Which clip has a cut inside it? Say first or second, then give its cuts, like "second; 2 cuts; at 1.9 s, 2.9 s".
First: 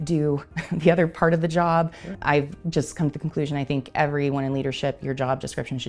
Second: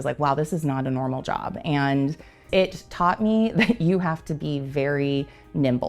second; 1 cut; at 2.4 s